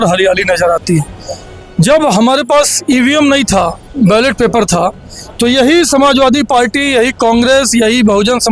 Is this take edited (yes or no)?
no